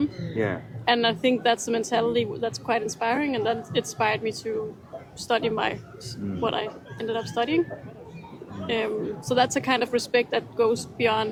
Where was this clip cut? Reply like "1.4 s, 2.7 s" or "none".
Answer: none